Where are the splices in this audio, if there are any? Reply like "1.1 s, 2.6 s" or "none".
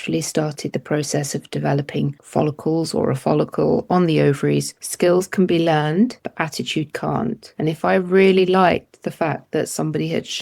2.2 s, 4.8 s, 6.2 s, 7.5 s